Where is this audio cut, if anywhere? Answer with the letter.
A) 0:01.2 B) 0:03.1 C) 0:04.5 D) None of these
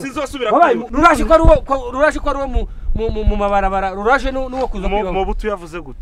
D